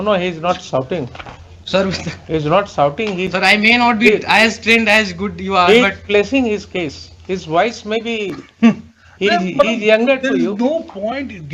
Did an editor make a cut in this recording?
no; 0 cuts

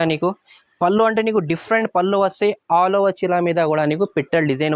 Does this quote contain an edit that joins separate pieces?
no; 0 cuts

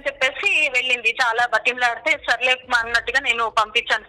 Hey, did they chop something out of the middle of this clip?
no; 0 cuts

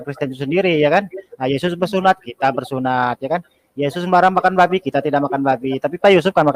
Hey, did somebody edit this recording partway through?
no; 0 cuts

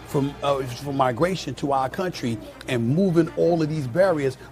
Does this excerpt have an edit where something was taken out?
no; 0 cuts

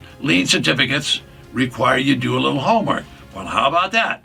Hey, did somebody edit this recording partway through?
no; 0 cuts

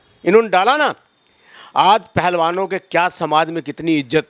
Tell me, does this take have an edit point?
no; 0 cuts

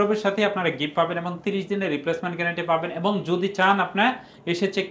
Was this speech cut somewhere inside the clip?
no; 0 cuts

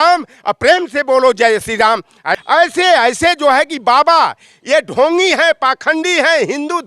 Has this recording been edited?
yes; 1 cut; at 2.3 s

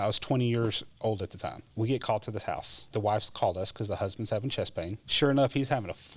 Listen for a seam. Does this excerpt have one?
yes; 3 cuts; at 1.6 s, 2.9 s, 5.0 s

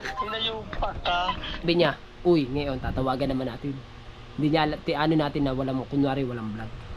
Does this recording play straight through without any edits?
no; 1 cut; at 1.6 s

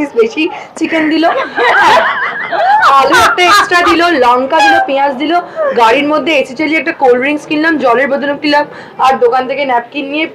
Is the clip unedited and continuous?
yes; 0 cuts

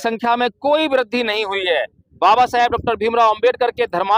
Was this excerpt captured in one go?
yes; 0 cuts

